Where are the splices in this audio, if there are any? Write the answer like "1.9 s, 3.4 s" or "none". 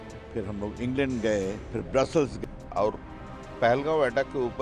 2.3 s

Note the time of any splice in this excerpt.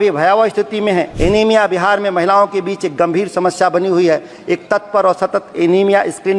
1.1 s

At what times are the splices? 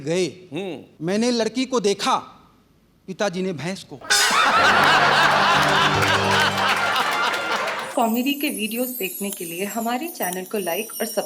7.8 s

